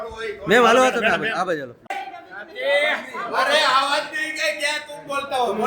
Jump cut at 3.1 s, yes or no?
no